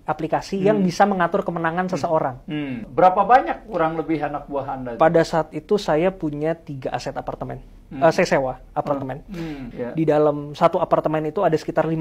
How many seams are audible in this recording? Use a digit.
2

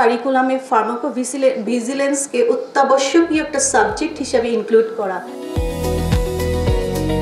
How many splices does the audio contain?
1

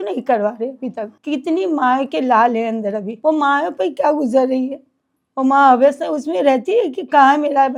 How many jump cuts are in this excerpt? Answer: 0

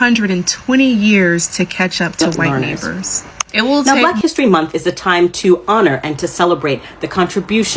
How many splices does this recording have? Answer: 1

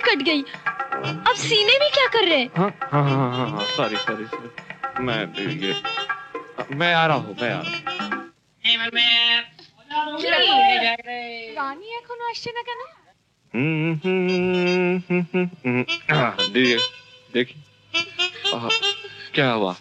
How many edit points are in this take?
0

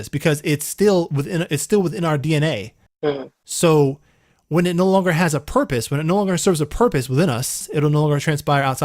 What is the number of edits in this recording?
2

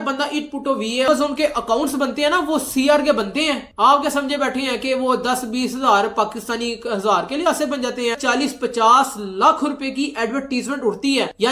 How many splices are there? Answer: 2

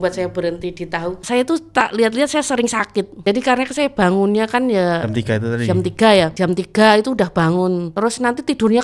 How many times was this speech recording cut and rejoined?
4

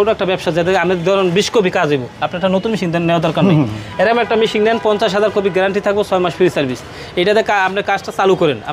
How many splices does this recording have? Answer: 0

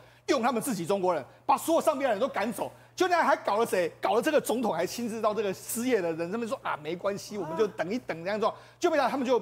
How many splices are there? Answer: 0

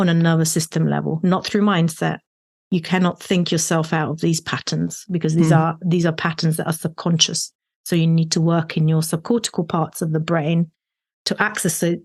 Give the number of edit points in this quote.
0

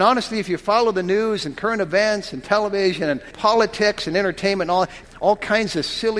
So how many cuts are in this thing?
2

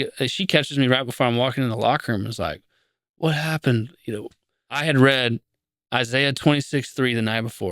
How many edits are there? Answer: 1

